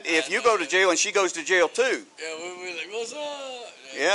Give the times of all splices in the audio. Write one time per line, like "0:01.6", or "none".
none